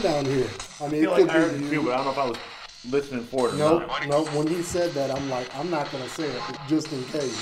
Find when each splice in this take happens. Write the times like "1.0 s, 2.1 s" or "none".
6.5 s

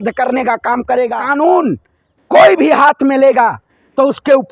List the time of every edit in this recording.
1.2 s

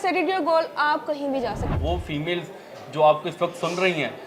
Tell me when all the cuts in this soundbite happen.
1.6 s

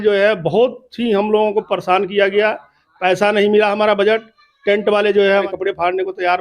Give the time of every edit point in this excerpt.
5.4 s

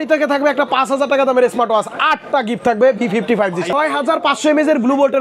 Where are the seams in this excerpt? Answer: 3.7 s

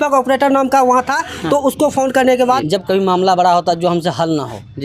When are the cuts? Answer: 2.6 s

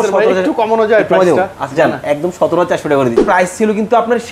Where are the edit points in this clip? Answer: 3.2 s

